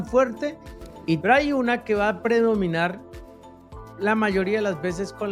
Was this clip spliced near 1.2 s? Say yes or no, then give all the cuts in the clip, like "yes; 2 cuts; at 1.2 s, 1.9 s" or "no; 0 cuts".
yes; 1 cut; at 1.2 s